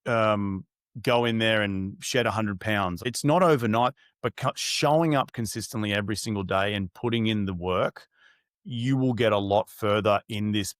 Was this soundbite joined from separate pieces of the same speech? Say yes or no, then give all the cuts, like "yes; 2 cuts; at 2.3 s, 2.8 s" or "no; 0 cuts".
yes; 2 cuts; at 3.1 s, 4.0 s